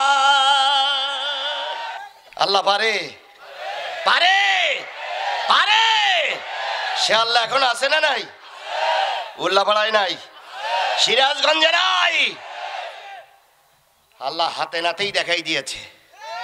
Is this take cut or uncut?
cut